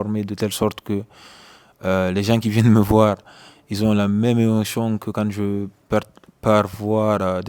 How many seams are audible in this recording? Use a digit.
0